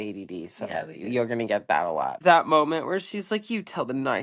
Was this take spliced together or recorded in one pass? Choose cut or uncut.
cut